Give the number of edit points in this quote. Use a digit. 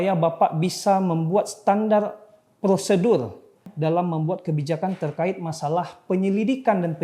1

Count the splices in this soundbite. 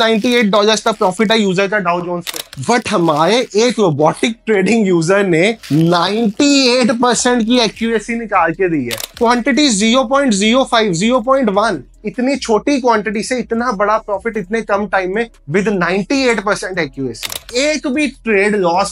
3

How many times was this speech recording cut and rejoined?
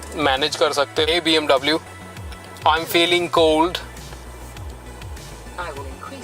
1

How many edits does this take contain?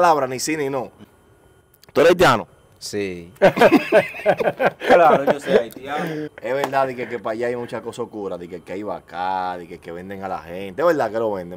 2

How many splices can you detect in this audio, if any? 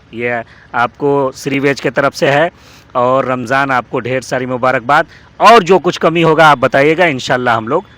0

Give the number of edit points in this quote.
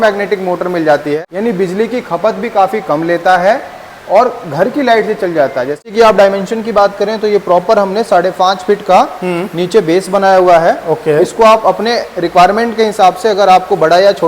2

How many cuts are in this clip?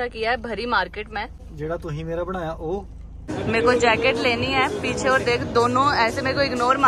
2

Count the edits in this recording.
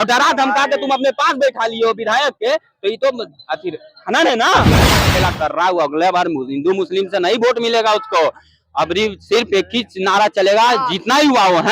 1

